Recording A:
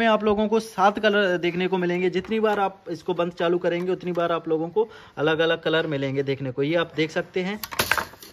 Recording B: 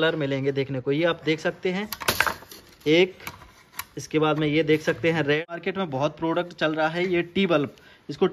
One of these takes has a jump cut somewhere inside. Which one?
B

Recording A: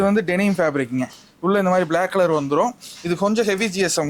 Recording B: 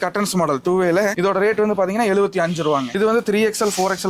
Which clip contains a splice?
B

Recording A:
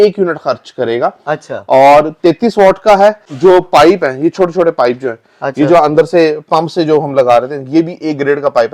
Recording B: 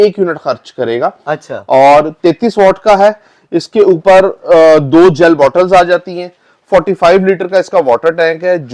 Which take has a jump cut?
A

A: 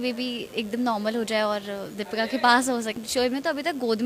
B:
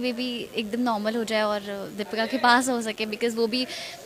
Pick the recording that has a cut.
A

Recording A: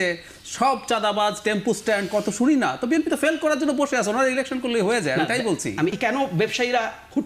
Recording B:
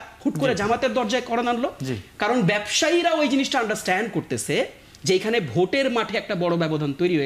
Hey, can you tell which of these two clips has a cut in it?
A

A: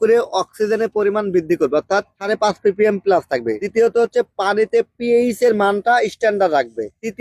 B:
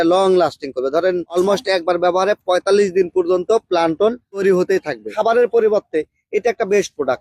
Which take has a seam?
B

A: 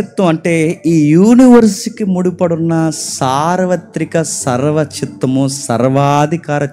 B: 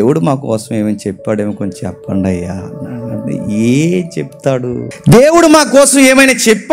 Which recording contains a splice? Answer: B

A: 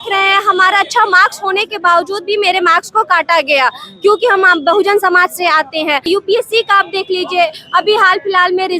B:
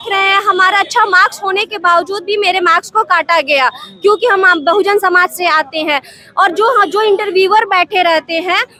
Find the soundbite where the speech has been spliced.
A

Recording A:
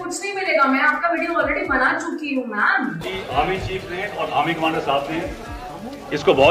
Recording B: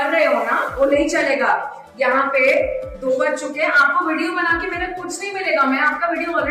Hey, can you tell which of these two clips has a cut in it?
A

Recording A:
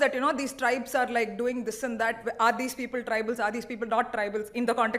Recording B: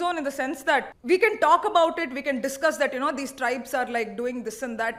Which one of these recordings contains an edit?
B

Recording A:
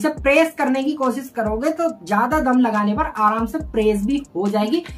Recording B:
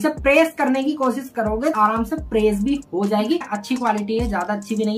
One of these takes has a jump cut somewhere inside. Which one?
B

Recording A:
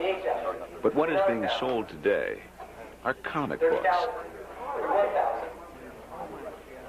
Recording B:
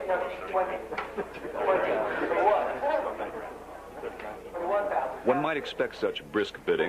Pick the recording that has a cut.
B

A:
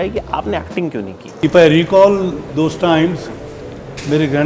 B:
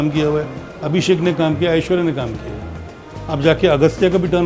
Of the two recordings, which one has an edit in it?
A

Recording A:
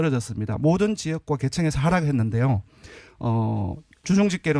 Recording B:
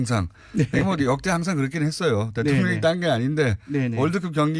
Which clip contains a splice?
B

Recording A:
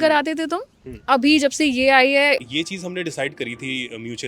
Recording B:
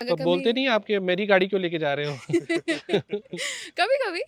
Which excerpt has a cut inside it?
A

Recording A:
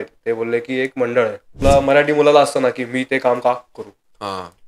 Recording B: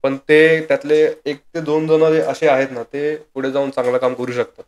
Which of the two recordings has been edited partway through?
A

